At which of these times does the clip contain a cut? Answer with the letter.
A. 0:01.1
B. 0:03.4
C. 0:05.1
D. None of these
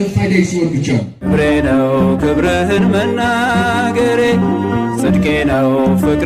A